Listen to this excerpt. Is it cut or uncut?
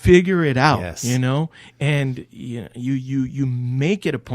uncut